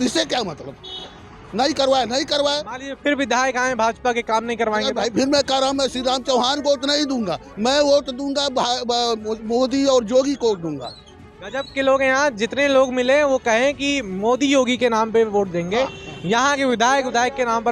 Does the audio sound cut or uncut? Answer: uncut